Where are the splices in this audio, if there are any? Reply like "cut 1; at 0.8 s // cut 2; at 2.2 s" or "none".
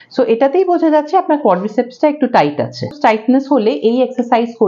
cut 1; at 2.9 s